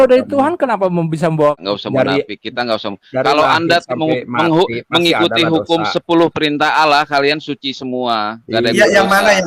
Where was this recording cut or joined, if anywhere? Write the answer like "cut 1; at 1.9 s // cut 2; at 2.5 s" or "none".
cut 1; at 1.6 s